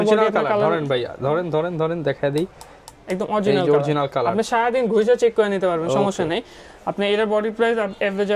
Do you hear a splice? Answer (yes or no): no